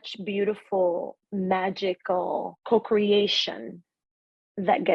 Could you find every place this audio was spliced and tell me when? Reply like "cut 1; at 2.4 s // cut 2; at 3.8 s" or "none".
cut 1; at 1.2 s // cut 2; at 2.5 s